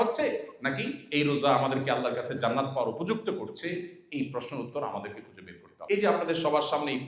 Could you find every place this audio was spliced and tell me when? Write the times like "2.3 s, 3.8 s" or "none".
5.7 s